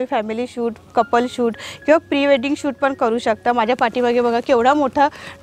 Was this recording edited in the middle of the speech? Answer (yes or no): no